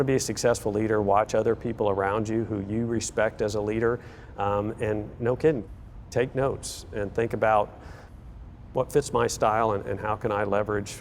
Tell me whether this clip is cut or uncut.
uncut